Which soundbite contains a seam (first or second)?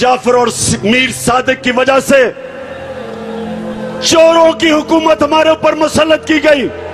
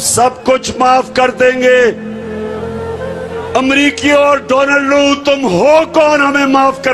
second